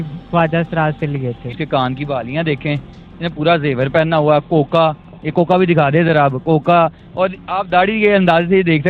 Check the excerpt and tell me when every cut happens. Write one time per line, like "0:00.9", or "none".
0:01.6

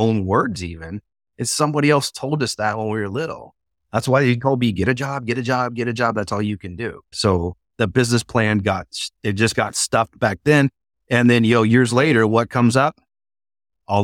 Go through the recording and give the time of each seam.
0:07.1

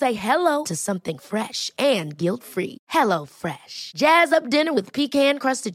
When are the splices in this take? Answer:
none

